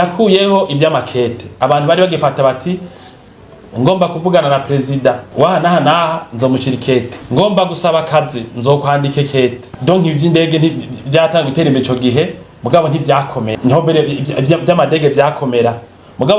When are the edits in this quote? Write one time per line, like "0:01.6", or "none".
0:05.2
0:07.2
0:09.7
0:13.5